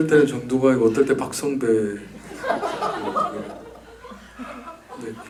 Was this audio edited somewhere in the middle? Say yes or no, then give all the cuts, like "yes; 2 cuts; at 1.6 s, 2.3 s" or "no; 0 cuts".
no; 0 cuts